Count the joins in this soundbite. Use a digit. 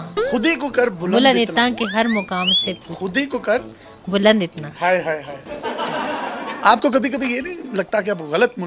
2